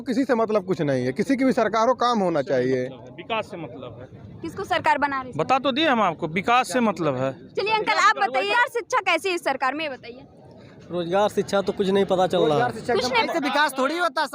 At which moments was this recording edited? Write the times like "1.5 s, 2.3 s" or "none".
8.5 s, 13.2 s